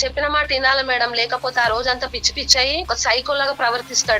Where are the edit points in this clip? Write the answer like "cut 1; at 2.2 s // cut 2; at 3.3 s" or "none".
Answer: cut 1; at 2.8 s